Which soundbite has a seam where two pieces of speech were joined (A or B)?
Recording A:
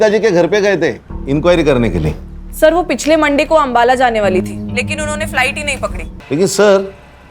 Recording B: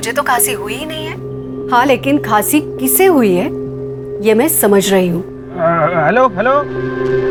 A